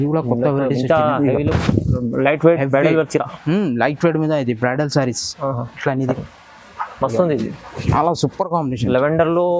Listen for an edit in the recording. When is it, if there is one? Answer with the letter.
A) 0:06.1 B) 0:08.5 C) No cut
A